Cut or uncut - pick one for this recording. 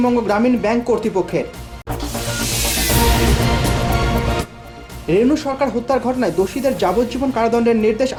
uncut